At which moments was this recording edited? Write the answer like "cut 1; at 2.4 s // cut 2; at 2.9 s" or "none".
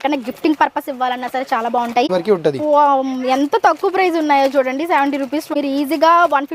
cut 1; at 2.1 s // cut 2; at 5.5 s